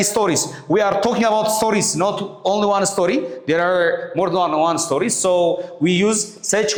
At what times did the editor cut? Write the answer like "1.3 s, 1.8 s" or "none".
none